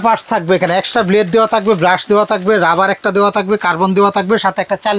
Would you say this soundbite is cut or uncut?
uncut